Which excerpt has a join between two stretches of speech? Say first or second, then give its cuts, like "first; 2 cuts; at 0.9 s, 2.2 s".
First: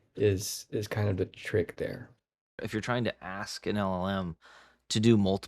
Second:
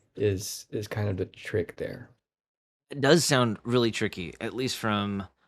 first; 1 cut; at 2.6 s